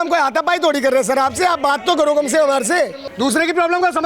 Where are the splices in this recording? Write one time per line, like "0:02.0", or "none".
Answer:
0:03.0